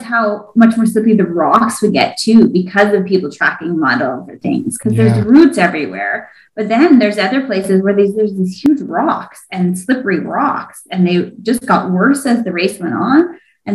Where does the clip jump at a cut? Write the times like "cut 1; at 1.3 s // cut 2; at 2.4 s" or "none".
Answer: none

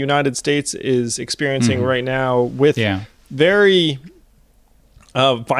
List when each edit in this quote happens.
cut 1; at 3.1 s

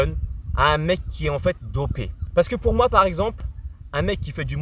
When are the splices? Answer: cut 1; at 2.1 s

